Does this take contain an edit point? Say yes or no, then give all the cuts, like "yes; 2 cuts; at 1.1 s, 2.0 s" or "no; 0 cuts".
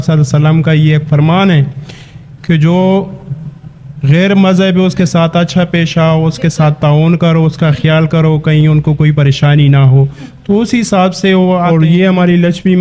yes; 1 cut; at 11.6 s